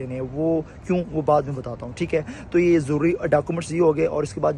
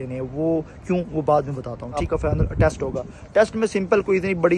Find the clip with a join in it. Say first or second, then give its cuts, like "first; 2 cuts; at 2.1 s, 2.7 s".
second; 1 cut; at 2.0 s